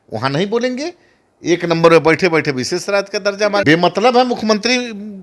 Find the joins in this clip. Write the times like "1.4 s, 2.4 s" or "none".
3.6 s